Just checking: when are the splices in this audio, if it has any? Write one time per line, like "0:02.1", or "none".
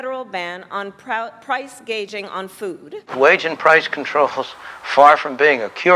0:02.9